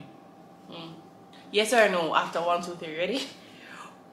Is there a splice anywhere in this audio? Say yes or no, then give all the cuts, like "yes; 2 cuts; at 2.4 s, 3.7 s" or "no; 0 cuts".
no; 0 cuts